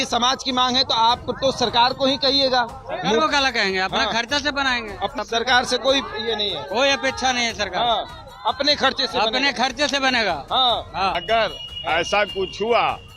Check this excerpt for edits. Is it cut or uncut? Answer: cut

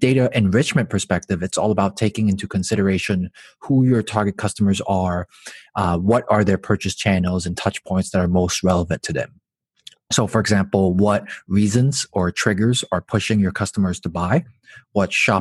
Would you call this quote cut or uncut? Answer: uncut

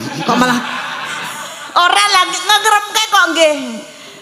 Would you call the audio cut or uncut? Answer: uncut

